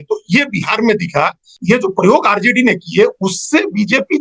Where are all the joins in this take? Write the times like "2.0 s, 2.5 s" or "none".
1.6 s